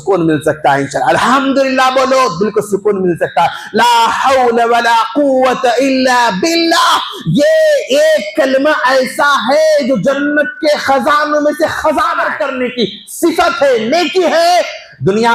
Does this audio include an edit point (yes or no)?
yes